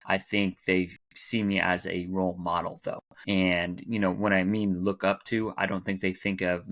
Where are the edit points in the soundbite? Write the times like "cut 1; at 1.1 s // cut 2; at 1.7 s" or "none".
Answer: cut 1; at 3.1 s